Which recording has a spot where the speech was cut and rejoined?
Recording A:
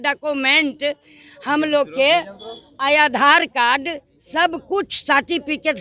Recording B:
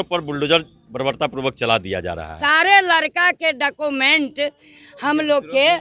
B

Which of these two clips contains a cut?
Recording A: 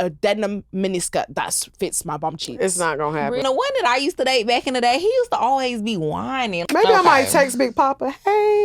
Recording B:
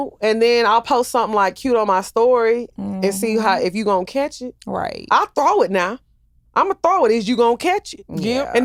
A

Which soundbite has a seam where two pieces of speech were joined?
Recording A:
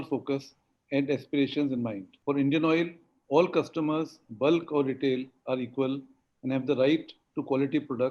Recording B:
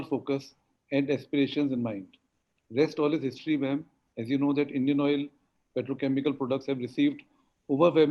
A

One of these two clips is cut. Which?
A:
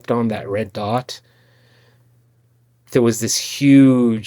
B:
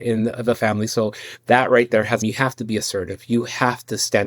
B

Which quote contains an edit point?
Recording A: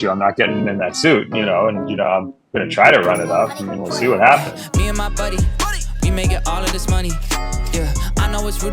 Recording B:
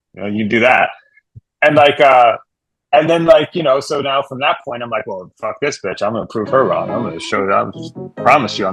A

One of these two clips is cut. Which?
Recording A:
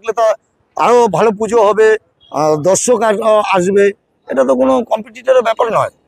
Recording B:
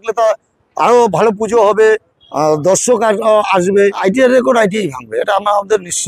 B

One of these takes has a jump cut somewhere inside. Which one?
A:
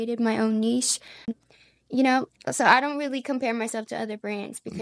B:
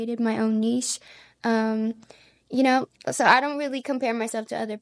A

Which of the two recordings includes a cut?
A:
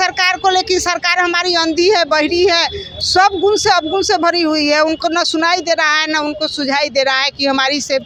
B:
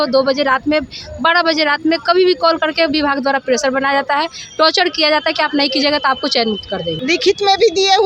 B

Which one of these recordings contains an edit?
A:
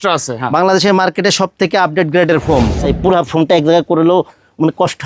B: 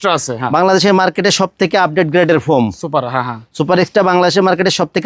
A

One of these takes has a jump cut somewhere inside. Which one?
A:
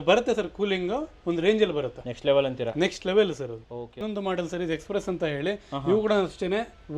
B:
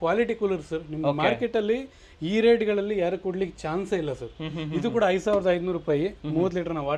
A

